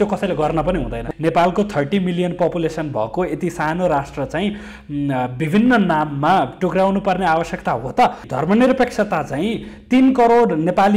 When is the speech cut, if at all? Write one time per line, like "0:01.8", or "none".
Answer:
0:01.0
0:08.3